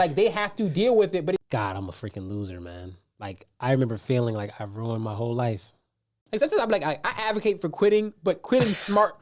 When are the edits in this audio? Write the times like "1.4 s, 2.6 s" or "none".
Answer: 1.4 s, 6.1 s